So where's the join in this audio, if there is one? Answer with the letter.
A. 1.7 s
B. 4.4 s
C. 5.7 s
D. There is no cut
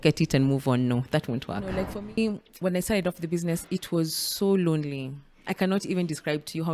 A